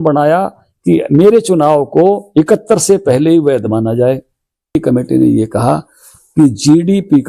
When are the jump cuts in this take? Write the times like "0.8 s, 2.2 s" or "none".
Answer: 4.8 s